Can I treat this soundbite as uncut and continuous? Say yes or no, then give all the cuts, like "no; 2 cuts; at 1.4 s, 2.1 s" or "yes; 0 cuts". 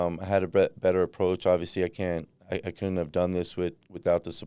yes; 0 cuts